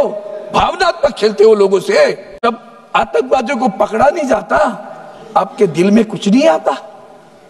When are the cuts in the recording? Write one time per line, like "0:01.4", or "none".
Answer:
0:02.4